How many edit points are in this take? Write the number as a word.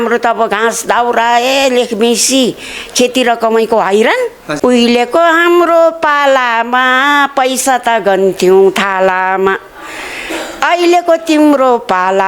one